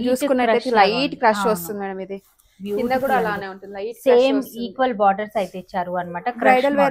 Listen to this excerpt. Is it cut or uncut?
uncut